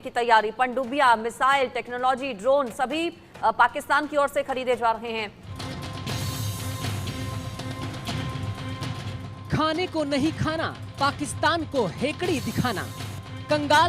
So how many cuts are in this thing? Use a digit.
1